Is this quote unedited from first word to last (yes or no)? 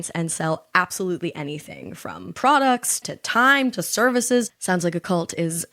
no